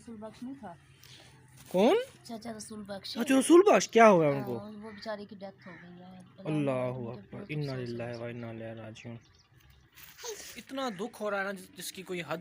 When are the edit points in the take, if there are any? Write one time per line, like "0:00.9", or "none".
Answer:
0:10.6

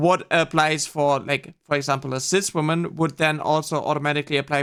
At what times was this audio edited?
none

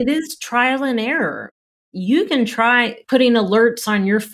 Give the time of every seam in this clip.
0:01.8
0:03.0

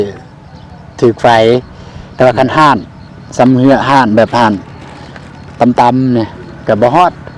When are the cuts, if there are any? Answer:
none

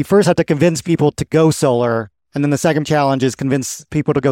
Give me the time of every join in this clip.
0:02.8

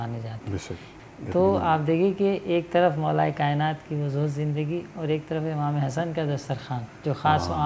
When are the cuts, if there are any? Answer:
0:00.9

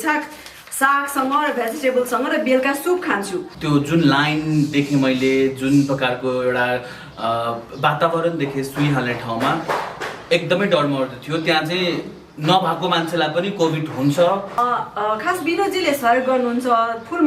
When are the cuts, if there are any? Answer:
0:03.5
0:14.6

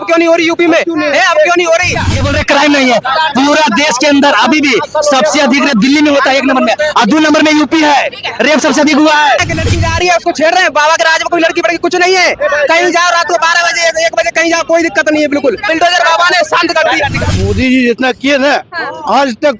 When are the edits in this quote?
0:02.0
0:09.5
0:15.7
0:17.2

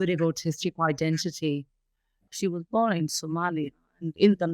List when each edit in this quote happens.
0:02.3

